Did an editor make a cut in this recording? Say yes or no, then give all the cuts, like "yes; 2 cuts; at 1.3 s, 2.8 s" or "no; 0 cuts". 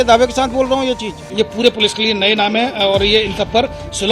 yes; 1 cut; at 1.2 s